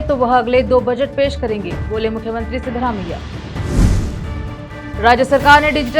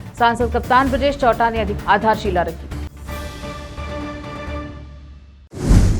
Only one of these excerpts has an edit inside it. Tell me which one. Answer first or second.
second